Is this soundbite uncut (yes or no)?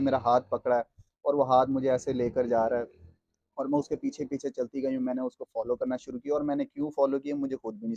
yes